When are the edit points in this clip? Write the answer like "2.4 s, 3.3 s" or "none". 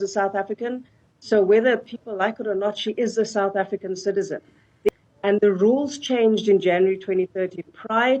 4.9 s